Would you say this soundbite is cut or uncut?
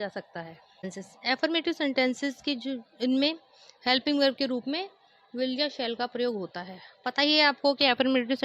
cut